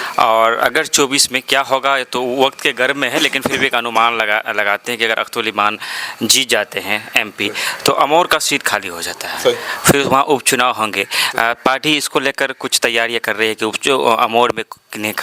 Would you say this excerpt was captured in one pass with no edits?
yes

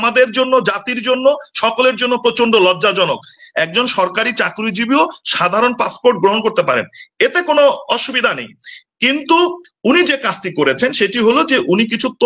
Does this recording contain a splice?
yes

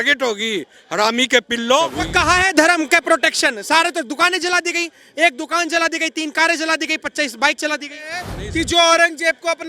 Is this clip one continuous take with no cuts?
no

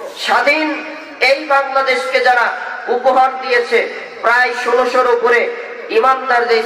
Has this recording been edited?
no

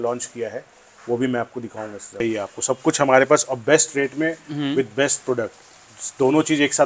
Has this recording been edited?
yes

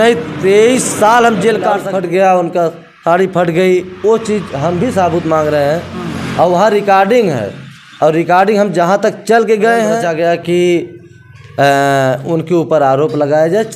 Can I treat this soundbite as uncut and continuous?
no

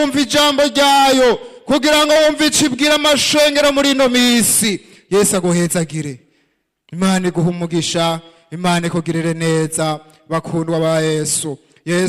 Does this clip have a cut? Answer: no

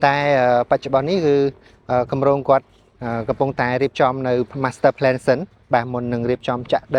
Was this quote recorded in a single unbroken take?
yes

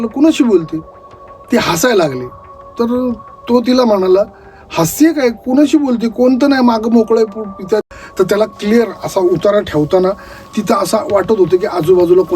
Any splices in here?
yes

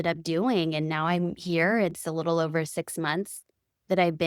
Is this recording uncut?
yes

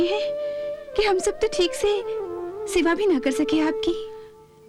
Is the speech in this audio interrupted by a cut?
no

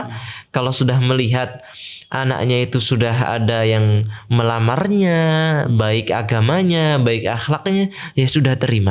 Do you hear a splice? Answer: no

